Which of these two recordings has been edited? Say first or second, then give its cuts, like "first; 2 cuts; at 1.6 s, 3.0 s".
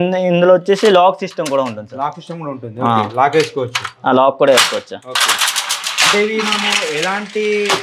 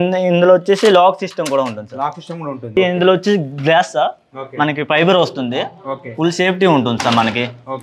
second; 1 cut; at 2.8 s